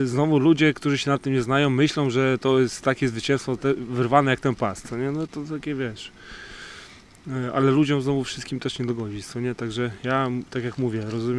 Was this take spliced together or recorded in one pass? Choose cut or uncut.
uncut